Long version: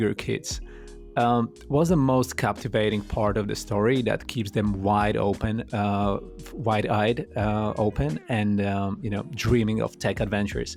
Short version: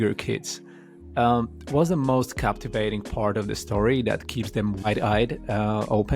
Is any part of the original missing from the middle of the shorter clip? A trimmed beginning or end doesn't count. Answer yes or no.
yes